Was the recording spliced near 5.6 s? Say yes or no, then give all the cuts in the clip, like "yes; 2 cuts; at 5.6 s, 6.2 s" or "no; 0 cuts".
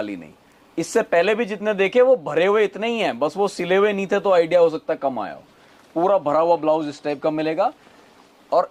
no; 0 cuts